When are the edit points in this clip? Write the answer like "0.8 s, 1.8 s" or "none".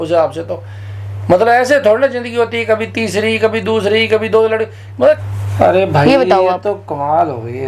5.3 s